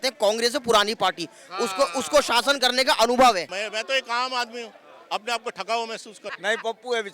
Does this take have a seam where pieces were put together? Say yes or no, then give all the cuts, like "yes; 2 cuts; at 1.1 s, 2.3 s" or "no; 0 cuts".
yes; 2 cuts; at 3.6 s, 6.2 s